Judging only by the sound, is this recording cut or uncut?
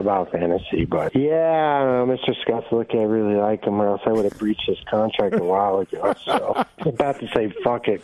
uncut